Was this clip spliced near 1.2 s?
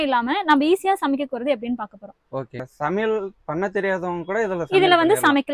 no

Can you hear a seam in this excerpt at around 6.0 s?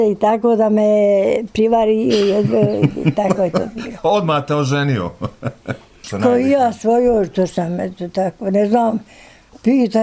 yes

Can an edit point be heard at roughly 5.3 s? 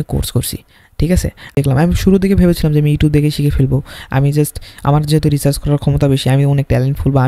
no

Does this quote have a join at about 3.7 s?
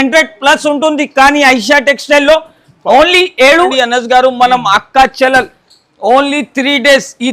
yes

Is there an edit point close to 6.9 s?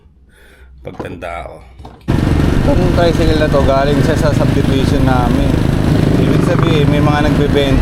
no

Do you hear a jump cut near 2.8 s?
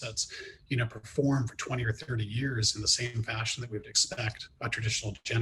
no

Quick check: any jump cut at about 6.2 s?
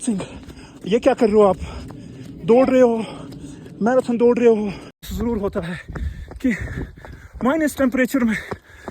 no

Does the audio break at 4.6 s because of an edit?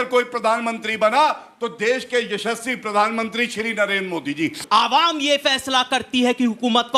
yes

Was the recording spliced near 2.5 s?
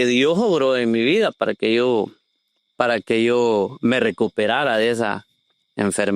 no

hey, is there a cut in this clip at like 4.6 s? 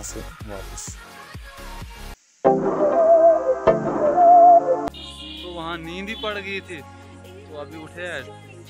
yes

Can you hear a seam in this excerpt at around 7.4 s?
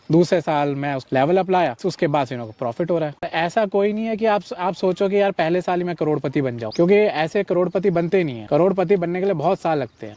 no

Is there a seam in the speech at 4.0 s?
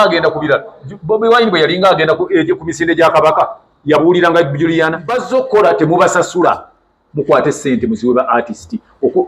no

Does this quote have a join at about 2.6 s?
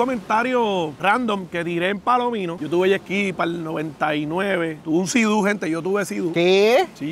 yes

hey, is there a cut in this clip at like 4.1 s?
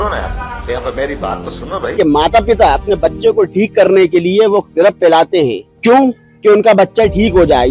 no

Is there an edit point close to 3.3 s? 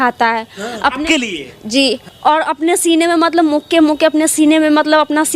no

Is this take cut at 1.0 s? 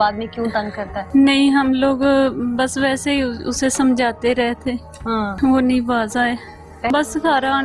yes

